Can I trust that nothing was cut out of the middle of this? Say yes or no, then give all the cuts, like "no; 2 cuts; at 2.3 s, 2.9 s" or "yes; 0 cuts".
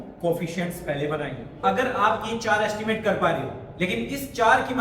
no; 1 cut; at 1.6 s